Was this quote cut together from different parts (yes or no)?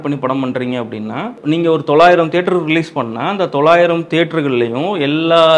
yes